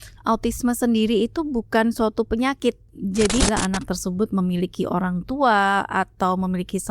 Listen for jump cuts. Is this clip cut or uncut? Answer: cut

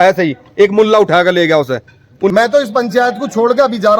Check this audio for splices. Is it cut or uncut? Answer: cut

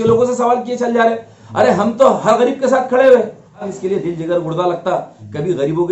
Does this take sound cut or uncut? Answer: cut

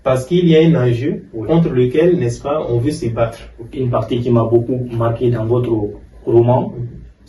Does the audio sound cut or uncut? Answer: cut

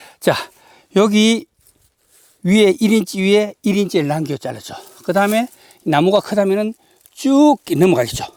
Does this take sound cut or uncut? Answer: uncut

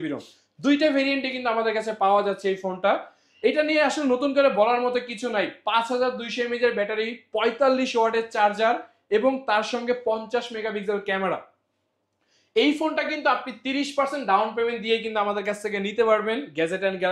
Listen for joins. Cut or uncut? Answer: uncut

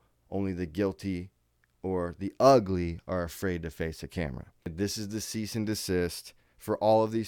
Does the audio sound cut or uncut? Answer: cut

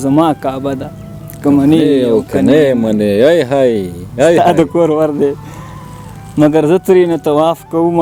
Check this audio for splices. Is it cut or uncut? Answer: uncut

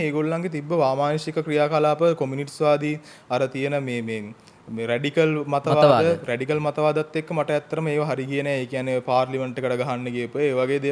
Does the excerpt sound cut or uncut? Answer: uncut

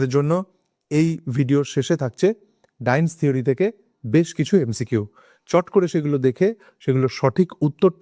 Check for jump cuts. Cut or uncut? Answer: uncut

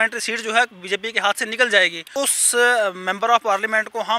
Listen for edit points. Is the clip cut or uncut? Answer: cut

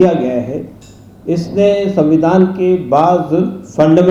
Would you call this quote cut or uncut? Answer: uncut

